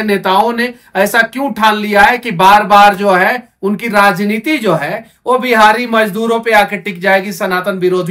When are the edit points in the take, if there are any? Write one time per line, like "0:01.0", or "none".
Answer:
none